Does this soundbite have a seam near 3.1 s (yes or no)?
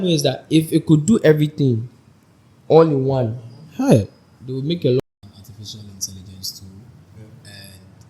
no